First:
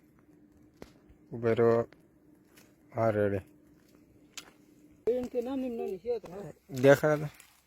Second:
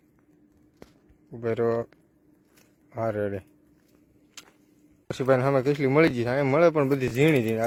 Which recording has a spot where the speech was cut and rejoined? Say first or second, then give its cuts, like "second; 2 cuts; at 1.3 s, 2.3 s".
first; 1 cut; at 5.1 s